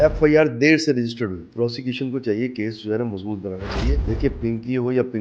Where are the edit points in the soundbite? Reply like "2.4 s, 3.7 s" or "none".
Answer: 1.5 s, 4.0 s